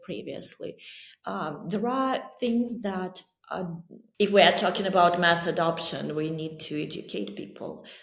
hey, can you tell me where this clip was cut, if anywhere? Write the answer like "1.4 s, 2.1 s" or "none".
4.2 s